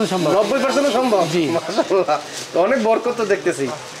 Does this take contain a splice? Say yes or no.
no